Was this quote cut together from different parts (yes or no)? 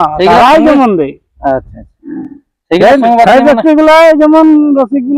no